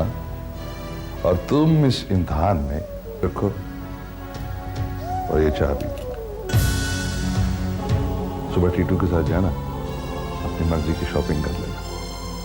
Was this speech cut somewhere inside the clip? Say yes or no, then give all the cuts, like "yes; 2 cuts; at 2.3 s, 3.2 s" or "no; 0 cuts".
yes; 1 cut; at 3.2 s